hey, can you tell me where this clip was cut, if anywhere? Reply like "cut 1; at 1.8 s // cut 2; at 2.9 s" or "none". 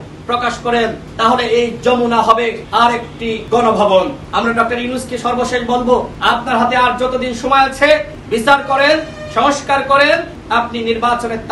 cut 1; at 1.0 s // cut 2; at 3.1 s // cut 3; at 4.2 s // cut 4; at 6.1 s // cut 5; at 8.2 s // cut 6; at 10.4 s